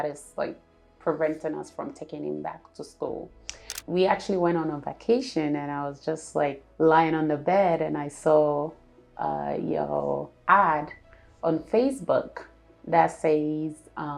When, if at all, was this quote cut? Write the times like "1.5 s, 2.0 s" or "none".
3.7 s, 6.6 s